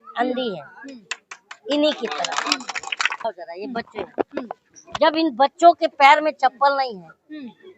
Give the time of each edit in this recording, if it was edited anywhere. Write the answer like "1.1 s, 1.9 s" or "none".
3.2 s